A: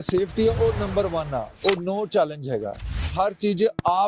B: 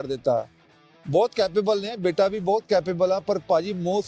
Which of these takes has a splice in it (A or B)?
A